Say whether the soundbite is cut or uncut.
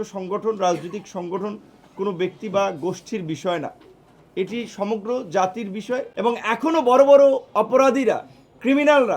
cut